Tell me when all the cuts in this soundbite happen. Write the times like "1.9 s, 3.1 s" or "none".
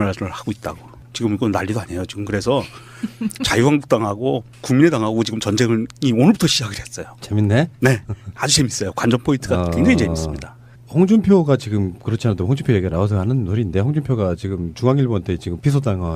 9.7 s